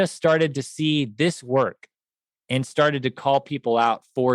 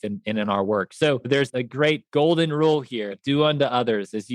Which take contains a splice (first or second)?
second